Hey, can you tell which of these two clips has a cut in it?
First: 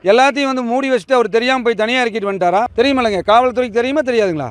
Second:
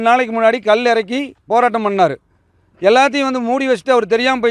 first; 1 cut; at 2.7 s

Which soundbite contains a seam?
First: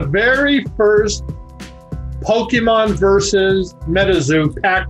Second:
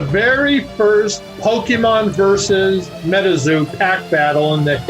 second; 1 cut; at 1.2 s

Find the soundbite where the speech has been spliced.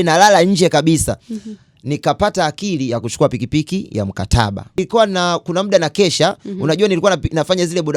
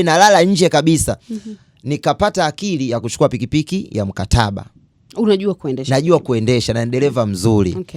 first; 1 cut; at 4.7 s

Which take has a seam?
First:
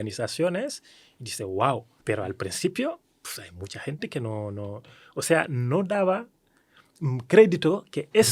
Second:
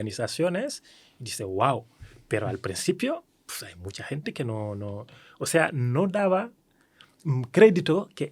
first; 1 cut; at 1.9 s

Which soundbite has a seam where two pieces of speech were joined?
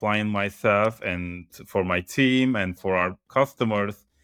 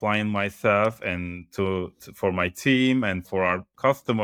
first; 1 cut; at 1.4 s

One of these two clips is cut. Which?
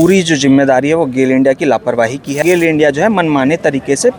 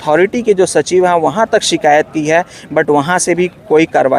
first; 1 cut; at 2.4 s

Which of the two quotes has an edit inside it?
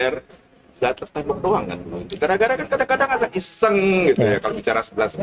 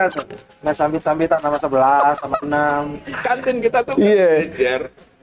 second; 1 cut; at 3.1 s

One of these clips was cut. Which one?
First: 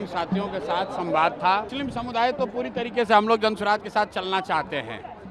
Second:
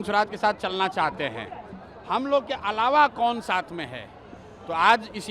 first; 1 cut; at 1.7 s

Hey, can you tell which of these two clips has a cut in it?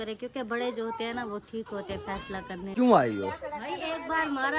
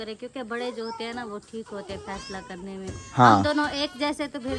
first; 1 cut; at 2.7 s

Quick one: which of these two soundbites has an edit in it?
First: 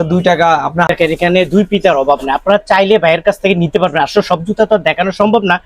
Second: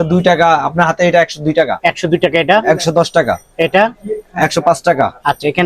first; 1 cut; at 0.9 s

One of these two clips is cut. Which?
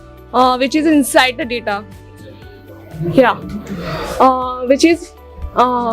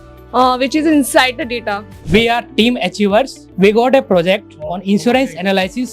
second; 2 cuts; at 1.9 s, 3.4 s

